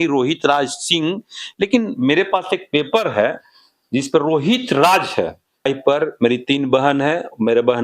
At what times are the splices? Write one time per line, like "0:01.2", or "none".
0:05.7